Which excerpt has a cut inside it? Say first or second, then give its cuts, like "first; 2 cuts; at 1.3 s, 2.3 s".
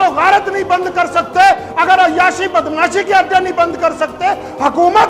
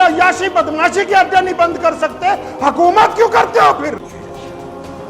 second; 1 cut; at 4.1 s